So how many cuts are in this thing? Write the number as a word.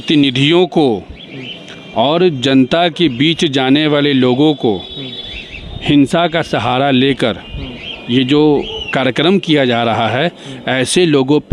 zero